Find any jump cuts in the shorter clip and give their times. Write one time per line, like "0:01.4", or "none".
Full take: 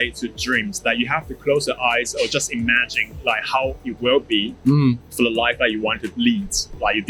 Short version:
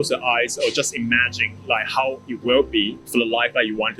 0:03.0

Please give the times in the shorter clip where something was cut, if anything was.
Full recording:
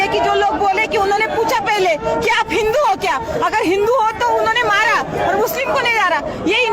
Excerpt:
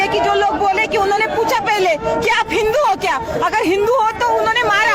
none

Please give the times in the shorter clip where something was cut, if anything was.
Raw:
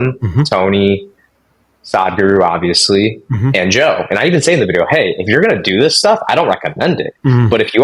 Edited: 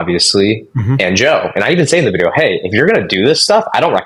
none

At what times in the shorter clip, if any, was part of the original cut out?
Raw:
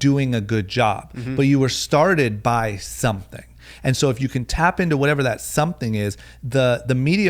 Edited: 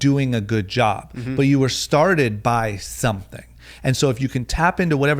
none

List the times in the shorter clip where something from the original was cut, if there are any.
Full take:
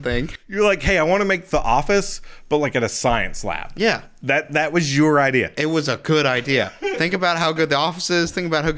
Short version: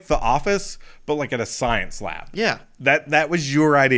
none

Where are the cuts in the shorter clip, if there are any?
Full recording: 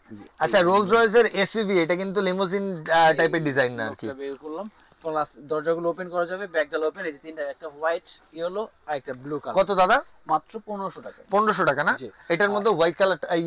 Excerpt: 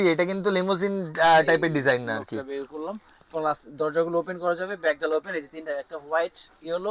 none

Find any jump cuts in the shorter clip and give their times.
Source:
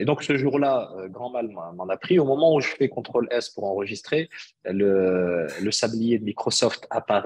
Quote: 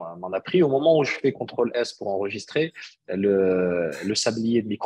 none

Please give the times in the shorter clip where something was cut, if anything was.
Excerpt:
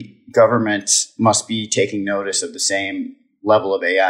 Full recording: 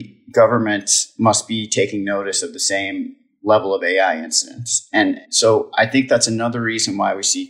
none

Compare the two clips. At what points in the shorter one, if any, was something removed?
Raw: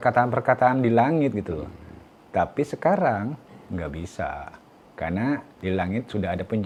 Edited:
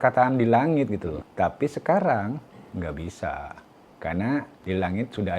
0:01.2

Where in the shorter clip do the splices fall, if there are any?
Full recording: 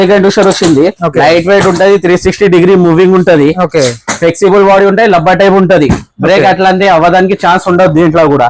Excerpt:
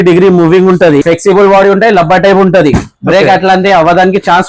0:01.0

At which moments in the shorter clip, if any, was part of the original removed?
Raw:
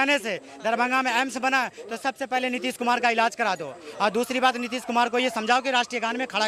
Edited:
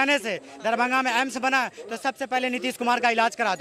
none

